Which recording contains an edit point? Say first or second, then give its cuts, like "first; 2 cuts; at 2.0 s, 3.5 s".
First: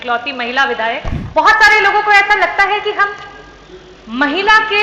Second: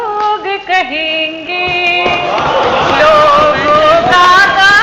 first; 1 cut; at 1.2 s